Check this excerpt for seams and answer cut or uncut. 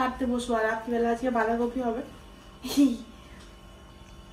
uncut